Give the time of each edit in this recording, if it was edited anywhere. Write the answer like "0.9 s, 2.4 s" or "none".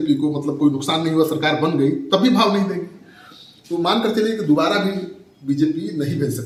none